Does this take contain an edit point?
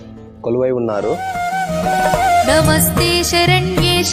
yes; 1 cut; at 1.2 s

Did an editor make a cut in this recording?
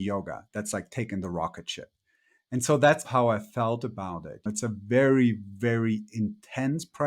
yes; 2 cuts; at 3.1 s, 4.5 s

